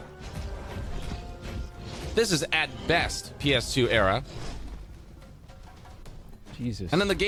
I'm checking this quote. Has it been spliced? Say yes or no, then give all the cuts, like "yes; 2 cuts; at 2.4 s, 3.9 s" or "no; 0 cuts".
no; 0 cuts